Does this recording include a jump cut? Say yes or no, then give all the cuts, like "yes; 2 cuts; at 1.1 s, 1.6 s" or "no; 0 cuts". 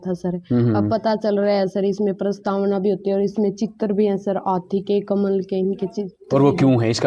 no; 0 cuts